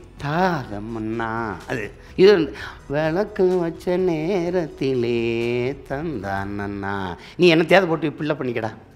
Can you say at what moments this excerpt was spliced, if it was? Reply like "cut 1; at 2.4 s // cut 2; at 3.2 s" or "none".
cut 1; at 2.0 s